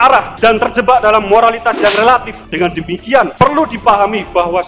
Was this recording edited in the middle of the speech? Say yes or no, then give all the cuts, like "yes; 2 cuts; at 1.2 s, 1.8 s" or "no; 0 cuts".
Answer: no; 0 cuts